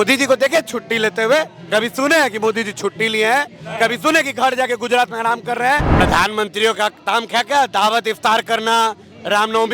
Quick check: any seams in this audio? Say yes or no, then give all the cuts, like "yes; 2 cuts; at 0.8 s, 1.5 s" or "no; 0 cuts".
yes; 1 cut; at 6.0 s